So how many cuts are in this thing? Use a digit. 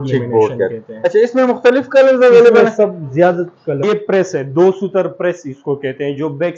1